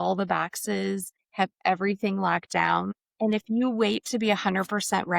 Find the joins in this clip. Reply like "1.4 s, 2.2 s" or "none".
1.2 s, 3.0 s